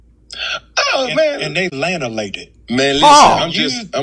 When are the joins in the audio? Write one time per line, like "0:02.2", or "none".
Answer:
0:01.3